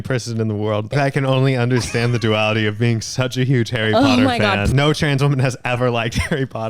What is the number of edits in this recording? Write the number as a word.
two